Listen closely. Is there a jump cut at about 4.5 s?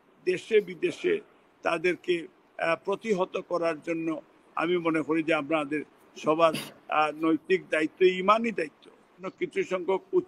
no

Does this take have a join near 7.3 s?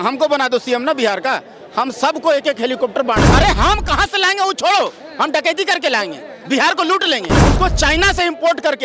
yes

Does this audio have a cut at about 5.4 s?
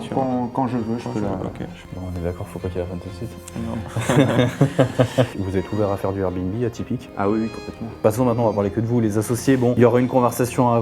yes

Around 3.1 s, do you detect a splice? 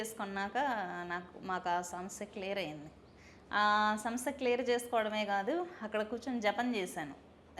no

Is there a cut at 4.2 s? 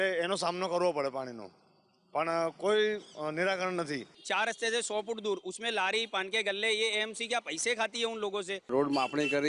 yes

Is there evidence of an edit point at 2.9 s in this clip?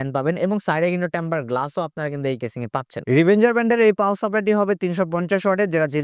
yes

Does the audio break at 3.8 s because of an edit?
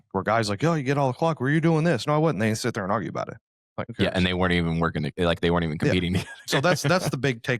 yes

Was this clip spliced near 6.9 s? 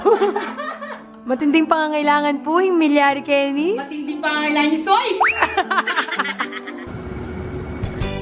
yes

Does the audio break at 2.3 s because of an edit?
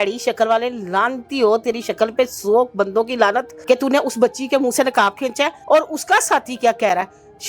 no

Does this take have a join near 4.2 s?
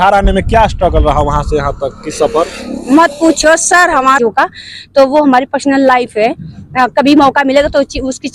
yes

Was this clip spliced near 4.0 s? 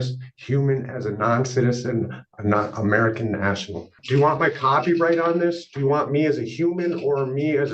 yes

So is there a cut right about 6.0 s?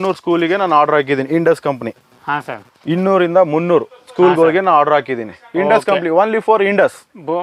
no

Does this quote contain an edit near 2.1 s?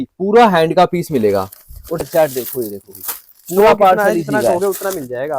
yes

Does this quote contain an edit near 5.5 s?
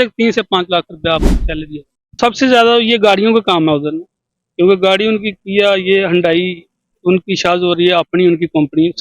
no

